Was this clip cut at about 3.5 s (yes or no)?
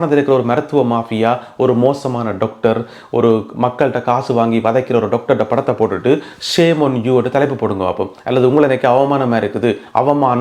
no